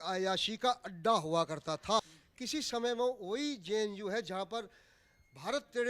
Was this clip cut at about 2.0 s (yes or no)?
yes